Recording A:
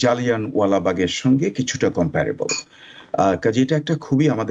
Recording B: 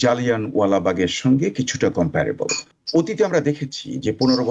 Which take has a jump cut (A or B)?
B